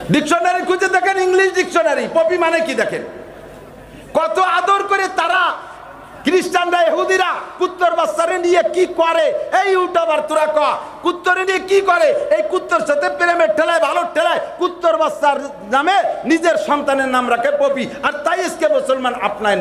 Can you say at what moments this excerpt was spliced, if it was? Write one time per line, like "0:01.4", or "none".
none